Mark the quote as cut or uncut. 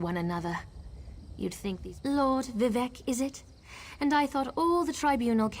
cut